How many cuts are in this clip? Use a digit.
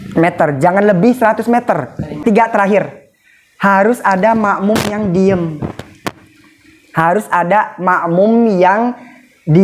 1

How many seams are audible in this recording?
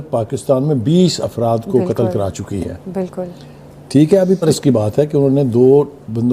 1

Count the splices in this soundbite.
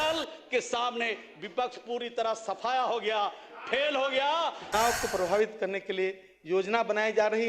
1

